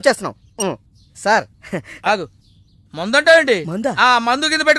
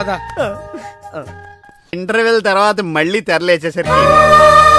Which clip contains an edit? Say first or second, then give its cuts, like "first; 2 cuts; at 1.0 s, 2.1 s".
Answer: second; 1 cut; at 1.9 s